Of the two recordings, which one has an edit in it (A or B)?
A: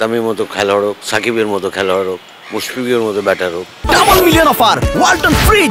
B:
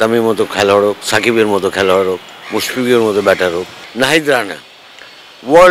B